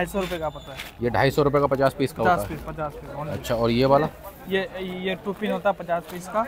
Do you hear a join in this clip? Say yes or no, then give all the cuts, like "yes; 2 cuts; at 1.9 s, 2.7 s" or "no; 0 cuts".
no; 0 cuts